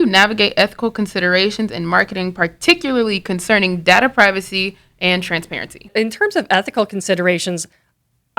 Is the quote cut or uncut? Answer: cut